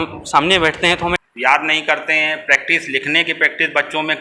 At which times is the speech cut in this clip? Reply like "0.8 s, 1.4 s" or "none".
1.2 s